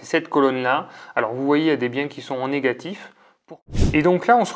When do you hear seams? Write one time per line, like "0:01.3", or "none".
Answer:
0:03.5